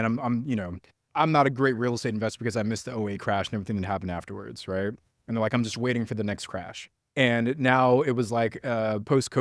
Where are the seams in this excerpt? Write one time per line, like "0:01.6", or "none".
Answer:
0:01.1